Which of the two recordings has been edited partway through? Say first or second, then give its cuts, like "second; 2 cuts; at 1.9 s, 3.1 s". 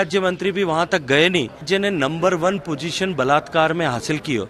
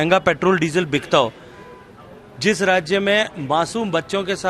first; 1 cut; at 1.6 s